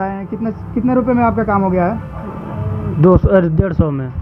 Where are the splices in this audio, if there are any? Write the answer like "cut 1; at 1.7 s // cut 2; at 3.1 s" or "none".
none